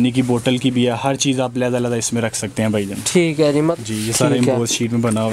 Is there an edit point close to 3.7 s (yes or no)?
yes